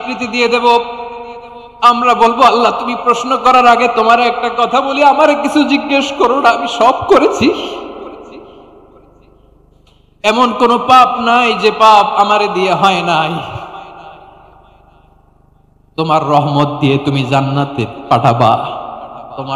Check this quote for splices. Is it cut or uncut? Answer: uncut